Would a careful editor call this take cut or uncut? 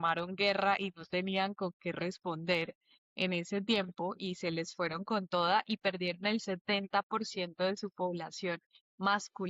uncut